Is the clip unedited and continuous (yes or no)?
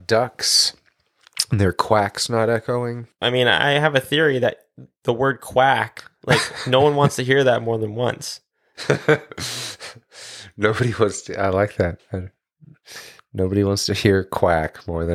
no